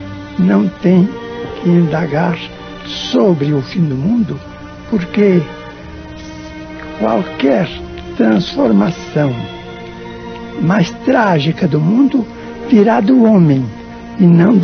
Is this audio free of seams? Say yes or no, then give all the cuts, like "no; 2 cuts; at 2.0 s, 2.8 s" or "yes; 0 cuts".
yes; 0 cuts